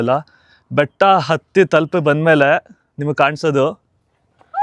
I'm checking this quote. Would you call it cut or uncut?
uncut